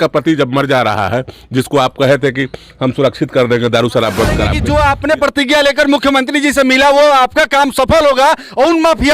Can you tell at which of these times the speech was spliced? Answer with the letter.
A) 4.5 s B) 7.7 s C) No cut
A